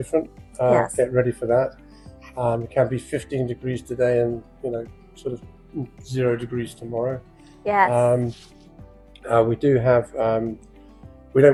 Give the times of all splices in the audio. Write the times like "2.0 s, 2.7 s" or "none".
none